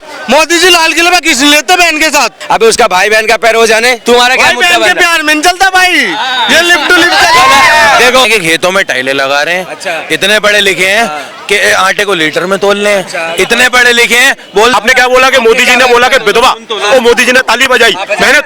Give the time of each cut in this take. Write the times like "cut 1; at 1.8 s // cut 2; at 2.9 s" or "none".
cut 1; at 2.4 s // cut 2; at 4.0 s // cut 3; at 8.2 s // cut 4; at 14.7 s